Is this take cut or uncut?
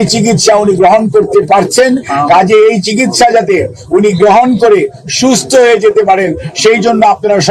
uncut